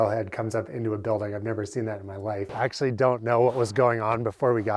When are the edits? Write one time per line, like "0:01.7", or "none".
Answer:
0:02.5